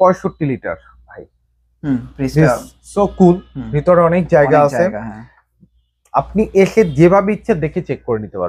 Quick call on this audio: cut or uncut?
uncut